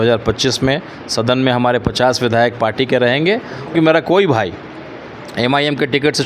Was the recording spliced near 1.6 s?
no; 1 cut; at 3.7 s

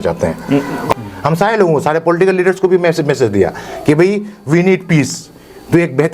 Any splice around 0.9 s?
yes; 1 cut; at 0.9 s

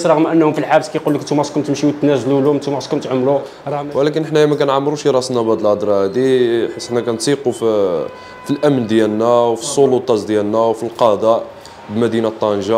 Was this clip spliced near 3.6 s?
yes; 1 cut; at 3.6 s

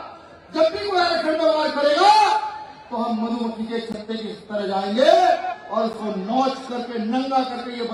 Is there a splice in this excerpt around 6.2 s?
no; 0 cuts

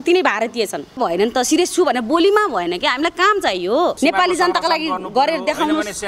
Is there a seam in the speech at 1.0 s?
yes; 2 cuts; at 1.0 s, 4.0 s

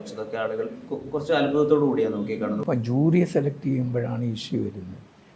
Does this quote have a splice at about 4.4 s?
no; 2 cuts; at 0.9 s, 2.6 s

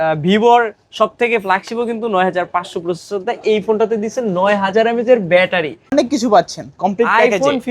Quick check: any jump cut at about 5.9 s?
yes; 1 cut; at 5.9 s

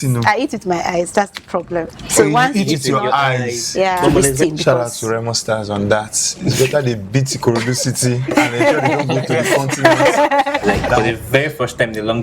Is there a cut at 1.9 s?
no; 2 cuts; at 4.2 s, 11.0 s

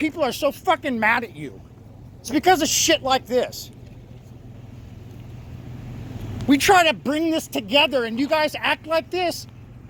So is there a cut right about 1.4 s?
no; 0 cuts

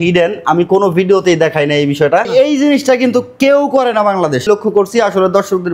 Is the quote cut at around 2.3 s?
yes; 2 cuts; at 2.3 s, 4.4 s

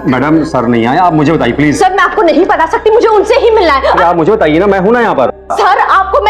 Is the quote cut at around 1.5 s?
no; 1 cut; at 5.3 s

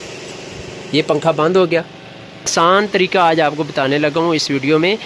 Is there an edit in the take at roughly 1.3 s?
no; 1 cut; at 2.5 s

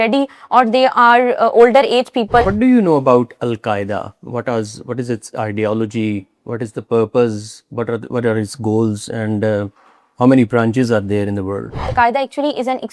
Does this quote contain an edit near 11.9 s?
yes; 2 cuts; at 2.5 s, 11.9 s

